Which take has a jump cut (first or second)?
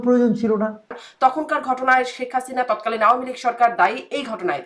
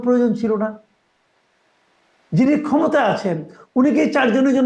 first